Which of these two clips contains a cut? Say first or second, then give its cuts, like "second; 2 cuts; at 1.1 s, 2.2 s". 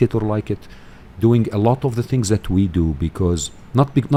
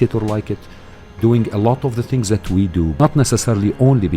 second; 1 cut; at 2.9 s